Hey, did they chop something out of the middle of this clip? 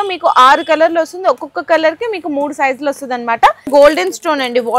yes; 1 cut; at 3.7 s

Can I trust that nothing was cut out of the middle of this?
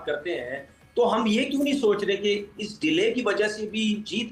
yes; 0 cuts

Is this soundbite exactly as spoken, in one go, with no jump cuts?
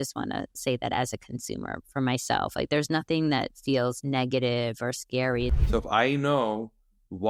no; 1 cut; at 5.6 s

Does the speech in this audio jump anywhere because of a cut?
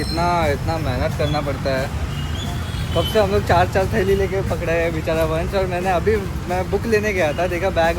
no; 0 cuts

